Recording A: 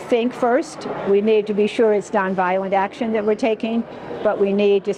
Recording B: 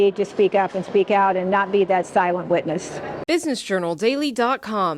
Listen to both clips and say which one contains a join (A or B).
B